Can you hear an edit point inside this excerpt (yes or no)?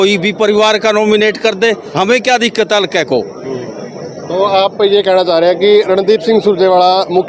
no